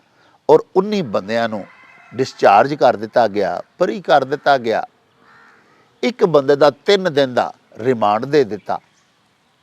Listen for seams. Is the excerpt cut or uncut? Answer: uncut